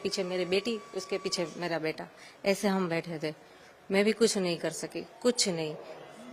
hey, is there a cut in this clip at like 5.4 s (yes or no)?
no